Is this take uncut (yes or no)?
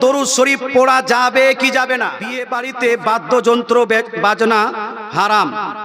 no